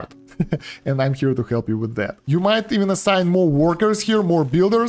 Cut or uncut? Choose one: uncut